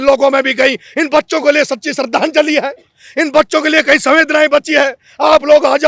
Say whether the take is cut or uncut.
uncut